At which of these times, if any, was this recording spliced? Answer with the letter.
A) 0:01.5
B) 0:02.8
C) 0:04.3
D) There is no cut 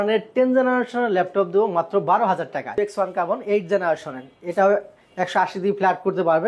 B